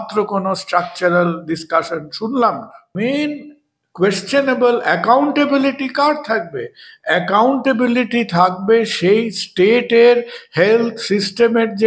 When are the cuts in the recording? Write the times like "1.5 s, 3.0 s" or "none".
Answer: 2.9 s